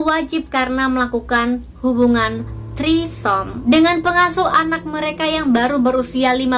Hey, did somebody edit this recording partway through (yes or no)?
no